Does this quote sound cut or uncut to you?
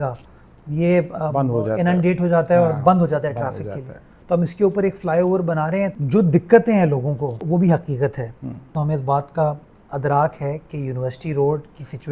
cut